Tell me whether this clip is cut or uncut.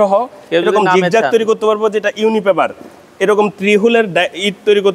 uncut